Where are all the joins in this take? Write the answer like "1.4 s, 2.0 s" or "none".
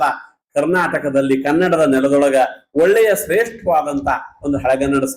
none